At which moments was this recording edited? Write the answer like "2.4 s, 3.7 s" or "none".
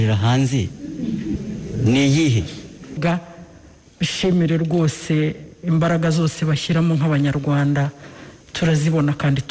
3.0 s

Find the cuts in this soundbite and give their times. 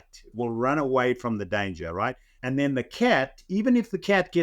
2.3 s

